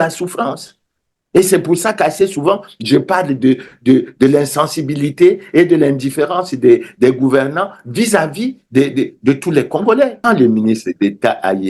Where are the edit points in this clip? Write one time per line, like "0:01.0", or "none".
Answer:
0:10.2